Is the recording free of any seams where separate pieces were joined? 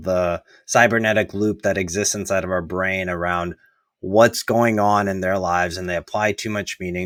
yes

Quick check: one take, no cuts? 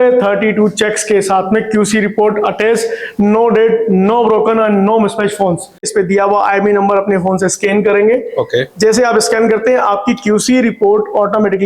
no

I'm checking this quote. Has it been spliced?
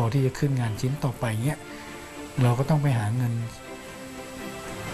no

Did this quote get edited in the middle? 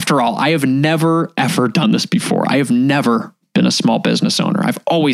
no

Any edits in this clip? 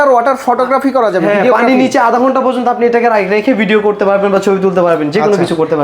no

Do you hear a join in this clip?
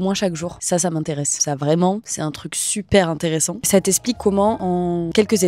no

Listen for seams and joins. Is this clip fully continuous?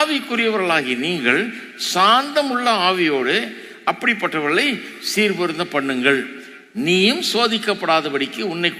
yes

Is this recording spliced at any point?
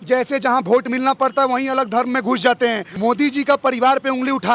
yes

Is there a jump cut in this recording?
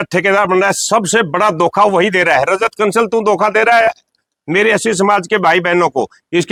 no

